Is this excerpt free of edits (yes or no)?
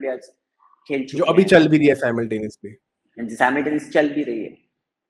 yes